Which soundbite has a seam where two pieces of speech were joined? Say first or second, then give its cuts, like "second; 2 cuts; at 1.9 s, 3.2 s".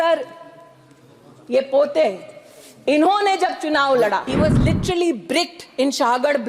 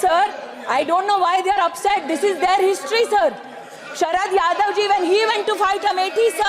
first; 1 cut; at 4.3 s